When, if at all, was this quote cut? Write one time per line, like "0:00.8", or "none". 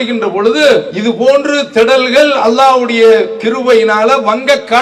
0:00.9